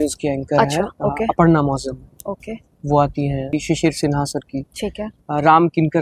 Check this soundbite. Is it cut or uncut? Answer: cut